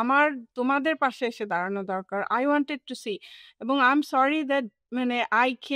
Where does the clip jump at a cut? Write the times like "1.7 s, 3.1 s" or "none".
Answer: none